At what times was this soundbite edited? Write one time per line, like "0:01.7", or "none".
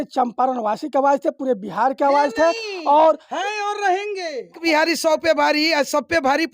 0:04.6